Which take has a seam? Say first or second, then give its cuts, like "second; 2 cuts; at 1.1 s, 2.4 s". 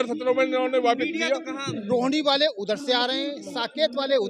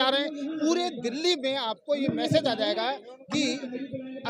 first; 1 cut; at 1.8 s